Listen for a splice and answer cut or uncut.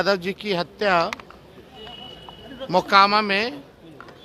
uncut